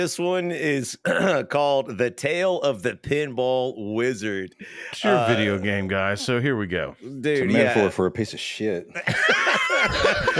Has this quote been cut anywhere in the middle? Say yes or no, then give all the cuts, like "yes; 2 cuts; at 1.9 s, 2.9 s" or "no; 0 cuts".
no; 0 cuts